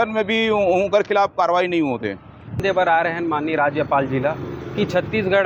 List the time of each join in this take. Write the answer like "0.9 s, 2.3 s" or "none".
none